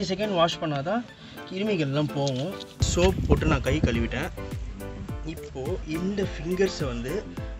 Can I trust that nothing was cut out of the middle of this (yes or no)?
no